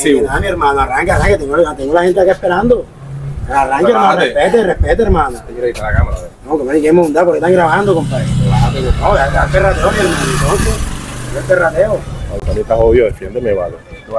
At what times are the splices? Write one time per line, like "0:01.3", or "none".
none

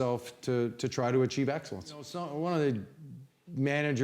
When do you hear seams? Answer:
0:02.2

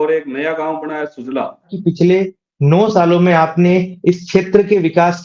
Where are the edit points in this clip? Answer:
0:01.7

